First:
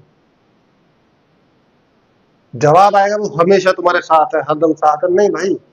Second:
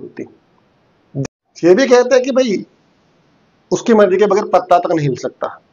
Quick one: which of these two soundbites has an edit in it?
second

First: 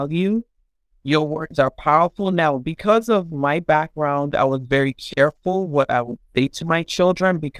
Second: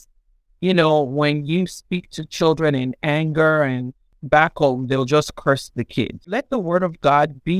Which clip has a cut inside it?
second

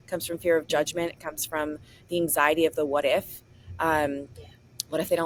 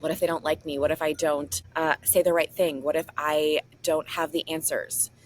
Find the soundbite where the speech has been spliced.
second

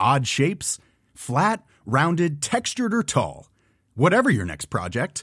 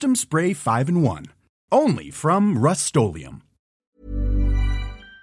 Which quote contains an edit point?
second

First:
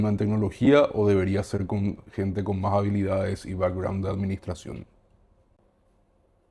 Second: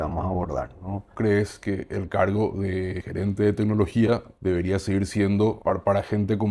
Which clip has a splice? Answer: second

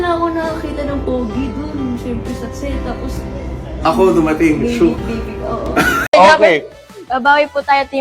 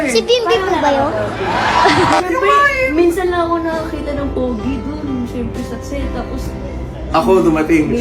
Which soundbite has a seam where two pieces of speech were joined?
first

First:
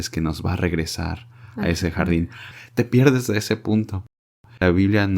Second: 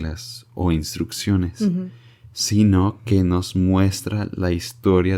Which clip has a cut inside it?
first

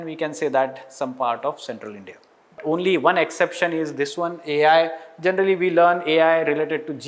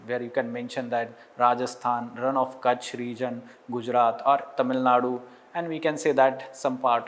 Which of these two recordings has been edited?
first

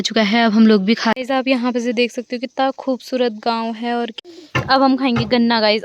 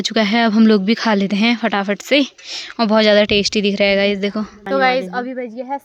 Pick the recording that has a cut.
first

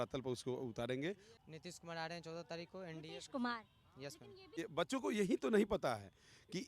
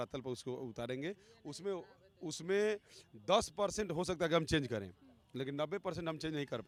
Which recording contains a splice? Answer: first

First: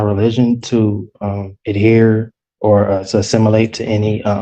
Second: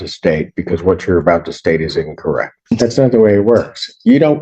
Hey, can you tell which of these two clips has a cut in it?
second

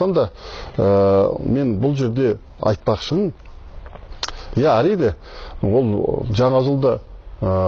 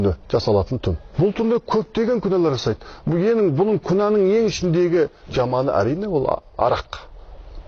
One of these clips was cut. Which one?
second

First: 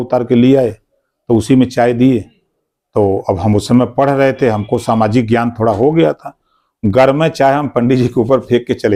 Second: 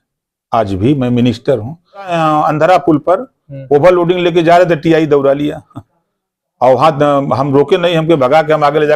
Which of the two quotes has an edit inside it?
second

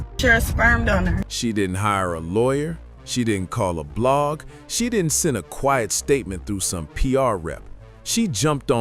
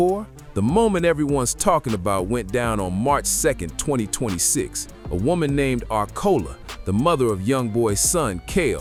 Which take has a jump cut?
first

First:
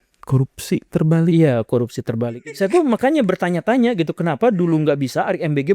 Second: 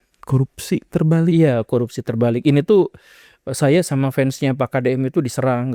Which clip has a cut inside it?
first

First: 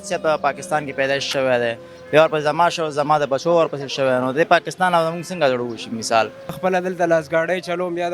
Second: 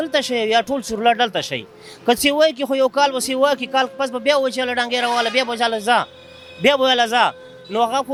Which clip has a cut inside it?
first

